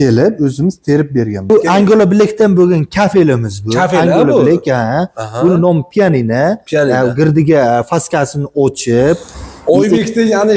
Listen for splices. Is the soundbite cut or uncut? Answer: cut